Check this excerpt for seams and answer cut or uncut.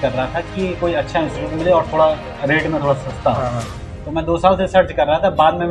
uncut